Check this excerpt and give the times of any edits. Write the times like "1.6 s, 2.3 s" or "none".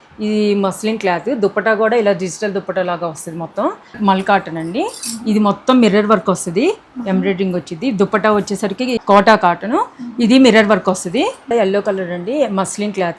4.0 s, 9.0 s, 11.5 s